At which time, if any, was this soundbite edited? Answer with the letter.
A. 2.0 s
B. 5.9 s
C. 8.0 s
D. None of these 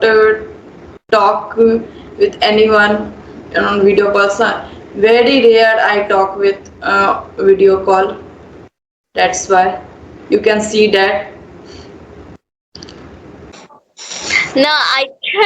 D